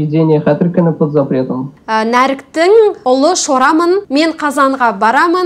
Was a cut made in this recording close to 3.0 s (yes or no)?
no